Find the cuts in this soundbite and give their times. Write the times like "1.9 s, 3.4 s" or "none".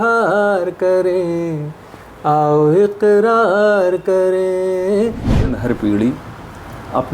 5.3 s